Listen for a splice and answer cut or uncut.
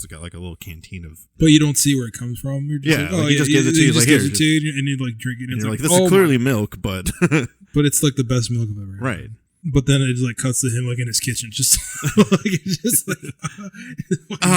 cut